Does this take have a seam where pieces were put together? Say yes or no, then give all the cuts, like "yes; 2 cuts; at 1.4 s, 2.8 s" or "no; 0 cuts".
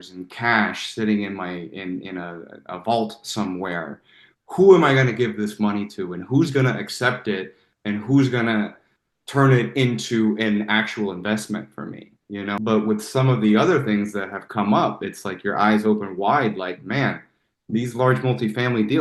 yes; 1 cut; at 12.6 s